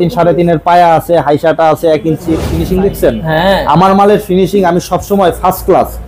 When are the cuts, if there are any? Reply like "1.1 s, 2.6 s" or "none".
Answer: 2.5 s